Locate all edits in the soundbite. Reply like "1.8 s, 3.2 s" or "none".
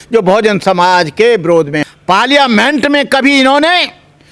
1.8 s